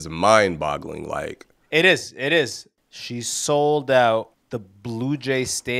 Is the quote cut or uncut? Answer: cut